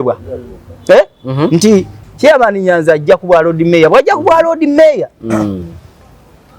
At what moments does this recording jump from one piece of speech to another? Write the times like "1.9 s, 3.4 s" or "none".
2.0 s